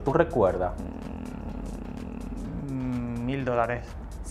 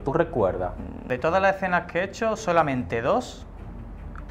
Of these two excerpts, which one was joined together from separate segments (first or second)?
second